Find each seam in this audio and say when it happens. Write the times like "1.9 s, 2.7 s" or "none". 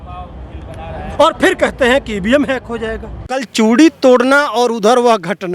3.5 s